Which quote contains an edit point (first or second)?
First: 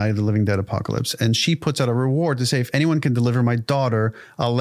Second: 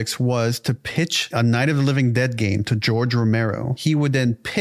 second